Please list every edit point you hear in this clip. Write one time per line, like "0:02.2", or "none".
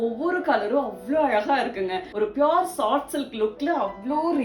0:02.1